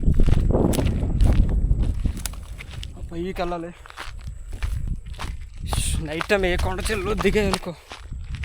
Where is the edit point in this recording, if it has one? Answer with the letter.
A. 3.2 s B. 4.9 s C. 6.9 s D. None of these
B